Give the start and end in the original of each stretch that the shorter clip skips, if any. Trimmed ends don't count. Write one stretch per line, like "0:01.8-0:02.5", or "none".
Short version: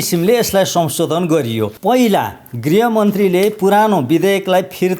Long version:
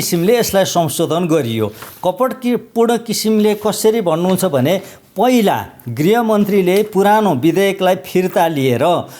0:01.7-0:05.1